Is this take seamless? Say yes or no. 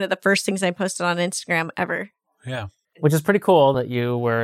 no